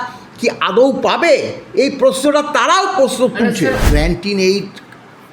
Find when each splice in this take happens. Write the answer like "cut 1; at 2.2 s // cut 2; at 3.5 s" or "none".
cut 1; at 3.8 s